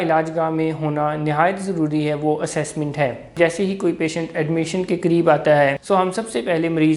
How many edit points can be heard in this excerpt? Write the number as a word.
two